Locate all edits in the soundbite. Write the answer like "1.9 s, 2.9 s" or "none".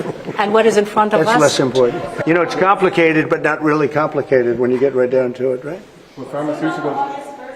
2.1 s

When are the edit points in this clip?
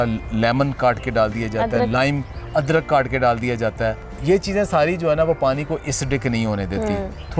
4.1 s

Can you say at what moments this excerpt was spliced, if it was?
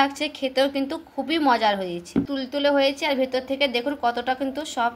2.3 s

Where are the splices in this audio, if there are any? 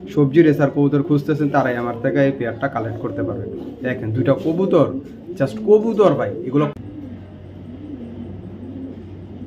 6.7 s

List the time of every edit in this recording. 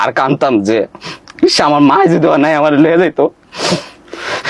none

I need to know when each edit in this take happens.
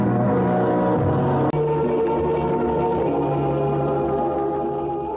1.5 s

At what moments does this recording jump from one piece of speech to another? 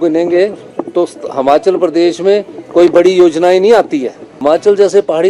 4.3 s

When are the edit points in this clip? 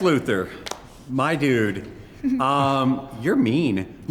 none

